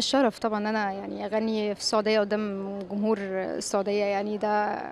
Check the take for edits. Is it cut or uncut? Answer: uncut